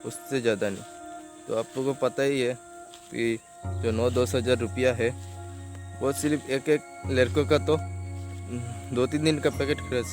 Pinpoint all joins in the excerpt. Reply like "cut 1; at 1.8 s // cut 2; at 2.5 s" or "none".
none